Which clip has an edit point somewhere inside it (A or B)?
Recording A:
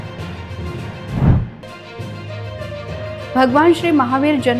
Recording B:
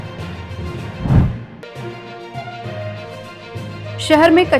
B